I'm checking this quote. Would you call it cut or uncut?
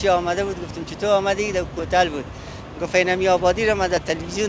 uncut